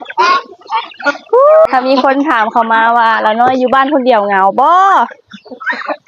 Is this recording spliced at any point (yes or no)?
yes